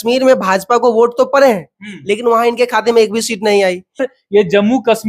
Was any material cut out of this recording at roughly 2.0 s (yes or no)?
no